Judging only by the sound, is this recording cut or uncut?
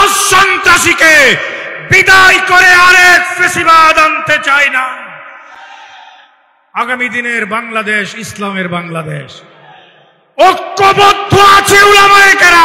uncut